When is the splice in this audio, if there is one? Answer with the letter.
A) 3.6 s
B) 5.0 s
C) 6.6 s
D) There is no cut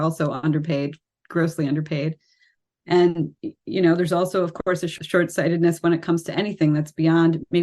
B